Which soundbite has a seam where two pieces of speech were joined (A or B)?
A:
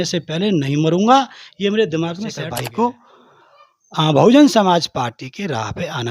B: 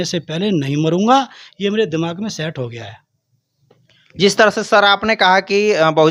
A